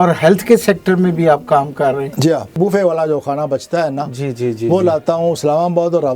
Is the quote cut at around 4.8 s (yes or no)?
no